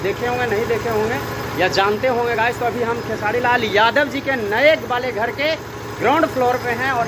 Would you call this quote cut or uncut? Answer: uncut